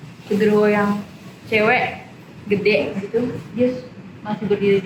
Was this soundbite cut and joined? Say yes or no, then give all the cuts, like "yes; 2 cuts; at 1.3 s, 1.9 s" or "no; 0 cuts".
no; 0 cuts